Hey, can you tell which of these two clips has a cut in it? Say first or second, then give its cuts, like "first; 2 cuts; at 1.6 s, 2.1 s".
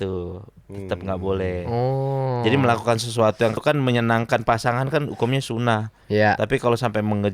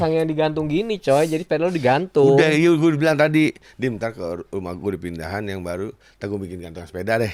first; 1 cut; at 3.6 s